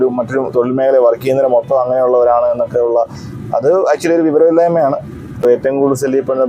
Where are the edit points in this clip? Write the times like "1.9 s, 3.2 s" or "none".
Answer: 5.4 s